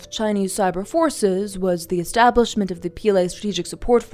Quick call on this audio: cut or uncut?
uncut